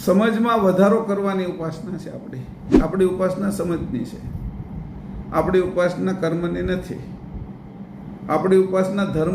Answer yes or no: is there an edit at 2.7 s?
yes